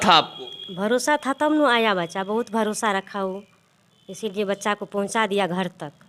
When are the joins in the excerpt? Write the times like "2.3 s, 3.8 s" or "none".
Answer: none

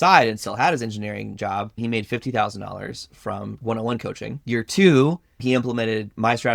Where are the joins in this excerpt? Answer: 1.7 s, 3.5 s, 4.4 s, 5.4 s

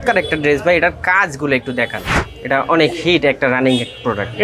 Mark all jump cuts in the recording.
2.2 s

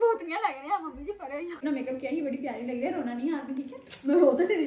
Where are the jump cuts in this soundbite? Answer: 1.6 s

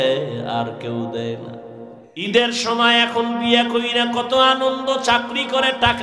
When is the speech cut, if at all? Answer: 2.2 s

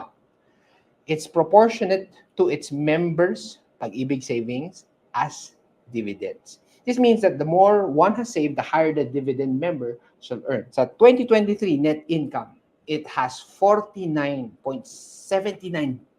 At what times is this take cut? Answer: 10.7 s

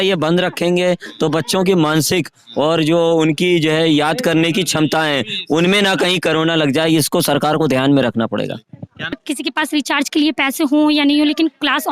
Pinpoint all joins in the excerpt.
9.2 s

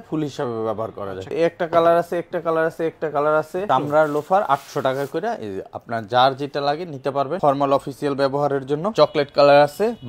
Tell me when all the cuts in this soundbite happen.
1.3 s, 3.6 s, 7.4 s, 8.9 s

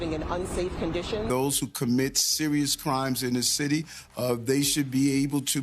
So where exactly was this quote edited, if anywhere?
none

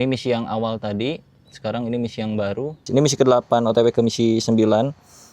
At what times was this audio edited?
2.8 s

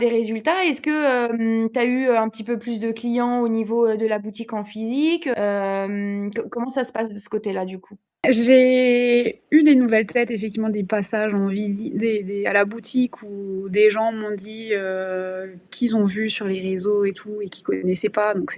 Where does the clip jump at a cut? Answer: none

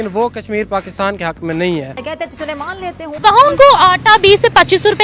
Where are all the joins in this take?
2.5 s

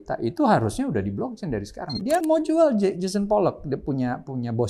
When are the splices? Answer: 2.2 s

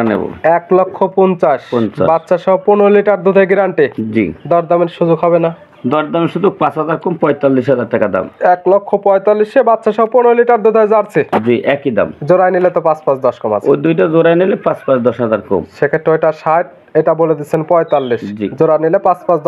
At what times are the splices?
none

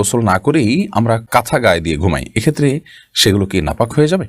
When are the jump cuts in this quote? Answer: 1.2 s

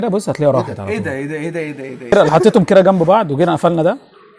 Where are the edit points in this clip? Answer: 2.1 s

